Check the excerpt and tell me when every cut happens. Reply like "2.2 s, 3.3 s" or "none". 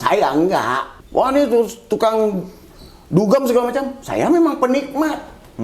0.9 s